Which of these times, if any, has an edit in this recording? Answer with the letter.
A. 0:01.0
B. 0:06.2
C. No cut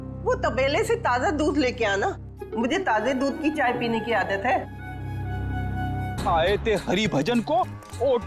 B